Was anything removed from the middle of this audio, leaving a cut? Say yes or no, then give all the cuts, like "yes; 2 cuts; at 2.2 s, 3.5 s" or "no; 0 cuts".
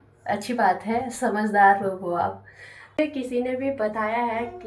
yes; 1 cut; at 3.0 s